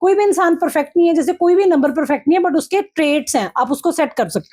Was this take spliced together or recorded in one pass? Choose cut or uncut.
uncut